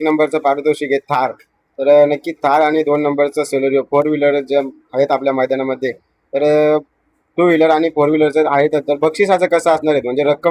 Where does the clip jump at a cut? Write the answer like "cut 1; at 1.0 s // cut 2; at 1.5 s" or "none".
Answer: none